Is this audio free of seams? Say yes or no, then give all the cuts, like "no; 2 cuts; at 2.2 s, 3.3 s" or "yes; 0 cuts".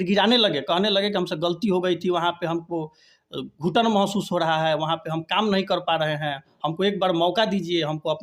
yes; 0 cuts